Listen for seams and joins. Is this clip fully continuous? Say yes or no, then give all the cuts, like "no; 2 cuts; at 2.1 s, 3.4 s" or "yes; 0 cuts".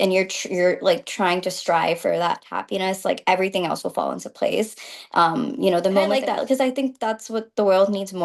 no; 1 cut; at 6.1 s